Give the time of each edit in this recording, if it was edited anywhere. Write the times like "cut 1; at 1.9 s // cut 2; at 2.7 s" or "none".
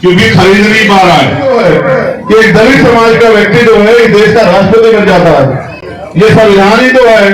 cut 1; at 1.4 s